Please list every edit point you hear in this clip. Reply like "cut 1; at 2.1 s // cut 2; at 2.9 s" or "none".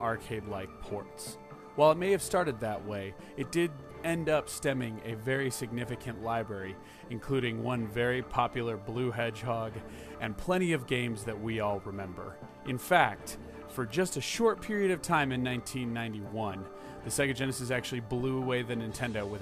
none